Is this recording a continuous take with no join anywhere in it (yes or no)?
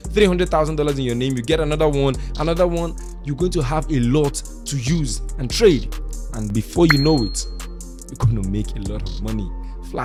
yes